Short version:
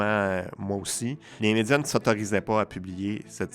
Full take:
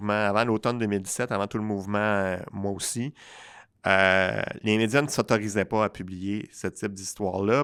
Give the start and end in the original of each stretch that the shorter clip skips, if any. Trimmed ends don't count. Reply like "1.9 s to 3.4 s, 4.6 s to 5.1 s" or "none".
3.2 s to 4.5 s